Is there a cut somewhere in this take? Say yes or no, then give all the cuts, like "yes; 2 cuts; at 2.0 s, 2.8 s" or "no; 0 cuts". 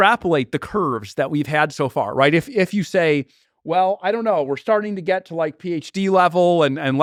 no; 0 cuts